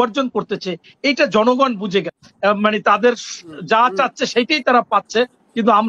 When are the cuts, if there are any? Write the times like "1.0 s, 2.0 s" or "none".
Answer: 2.2 s